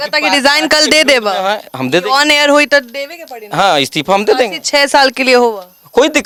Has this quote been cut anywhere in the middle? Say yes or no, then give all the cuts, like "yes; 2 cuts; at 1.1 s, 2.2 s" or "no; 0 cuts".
no; 0 cuts